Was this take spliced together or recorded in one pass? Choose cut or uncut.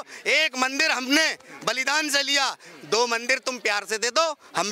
uncut